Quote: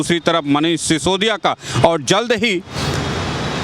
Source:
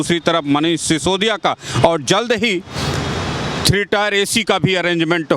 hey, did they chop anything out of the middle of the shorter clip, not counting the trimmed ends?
no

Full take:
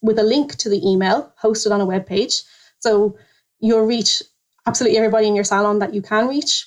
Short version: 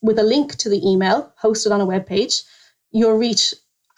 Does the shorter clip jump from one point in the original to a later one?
yes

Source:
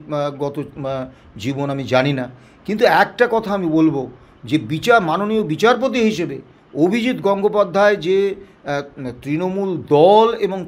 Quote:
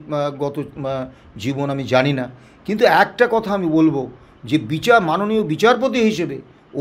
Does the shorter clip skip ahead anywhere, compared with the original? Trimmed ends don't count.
no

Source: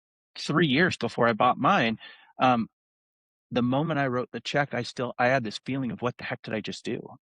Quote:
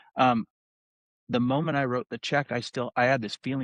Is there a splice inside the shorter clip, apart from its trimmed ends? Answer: no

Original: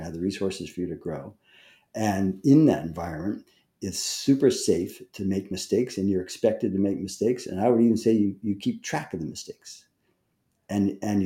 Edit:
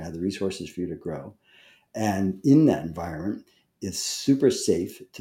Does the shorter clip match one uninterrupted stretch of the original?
yes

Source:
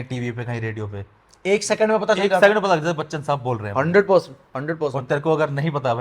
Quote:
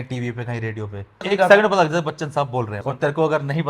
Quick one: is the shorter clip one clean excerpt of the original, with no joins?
no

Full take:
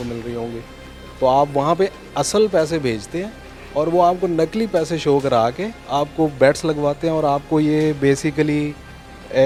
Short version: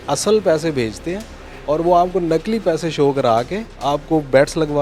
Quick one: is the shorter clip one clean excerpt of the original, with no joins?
yes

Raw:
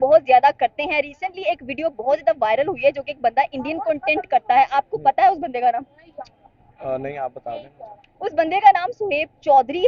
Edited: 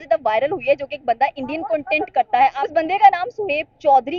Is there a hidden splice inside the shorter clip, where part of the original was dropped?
yes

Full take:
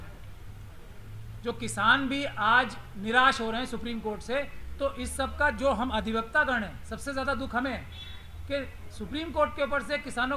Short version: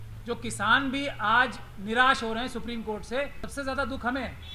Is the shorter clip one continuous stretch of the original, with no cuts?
no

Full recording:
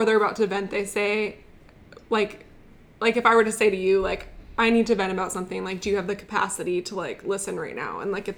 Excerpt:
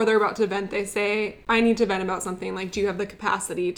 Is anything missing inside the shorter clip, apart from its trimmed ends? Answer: yes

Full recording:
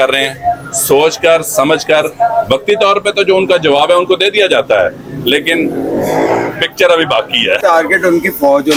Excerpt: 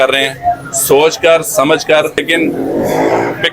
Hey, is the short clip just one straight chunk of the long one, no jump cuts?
no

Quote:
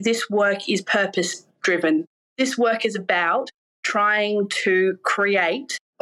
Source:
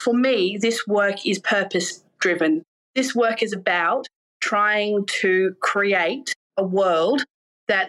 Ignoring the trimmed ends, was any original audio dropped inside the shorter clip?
no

